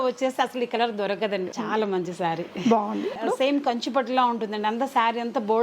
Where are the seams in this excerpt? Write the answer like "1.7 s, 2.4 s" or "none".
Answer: 1.5 s, 3.1 s